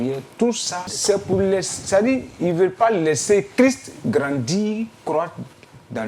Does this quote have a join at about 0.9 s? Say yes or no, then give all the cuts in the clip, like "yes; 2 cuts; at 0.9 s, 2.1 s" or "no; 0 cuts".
yes; 1 cut; at 0.9 s